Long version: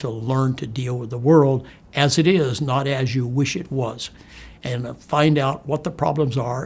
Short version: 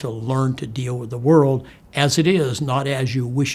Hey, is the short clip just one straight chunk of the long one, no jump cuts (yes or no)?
yes